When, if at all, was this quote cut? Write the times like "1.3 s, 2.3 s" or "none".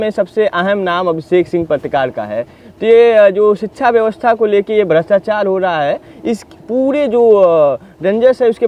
none